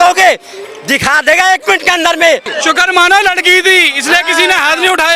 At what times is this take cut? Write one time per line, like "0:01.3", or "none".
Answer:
0:02.5